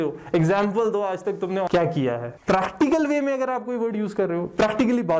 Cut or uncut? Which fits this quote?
uncut